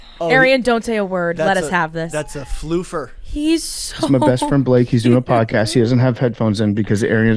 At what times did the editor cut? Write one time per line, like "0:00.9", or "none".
none